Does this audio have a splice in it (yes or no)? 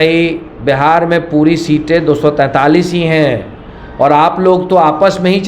no